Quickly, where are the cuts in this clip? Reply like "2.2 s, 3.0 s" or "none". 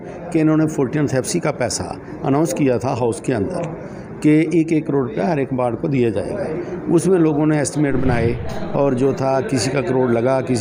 none